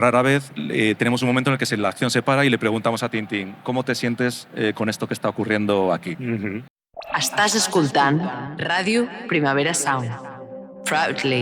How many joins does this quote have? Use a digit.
1